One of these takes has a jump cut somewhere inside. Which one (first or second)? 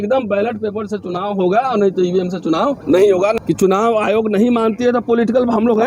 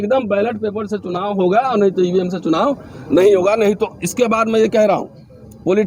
first